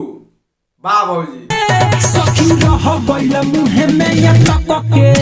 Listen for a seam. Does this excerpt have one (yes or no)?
no